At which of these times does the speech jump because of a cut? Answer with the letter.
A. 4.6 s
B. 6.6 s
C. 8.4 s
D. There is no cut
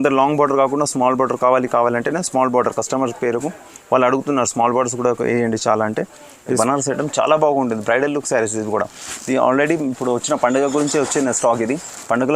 B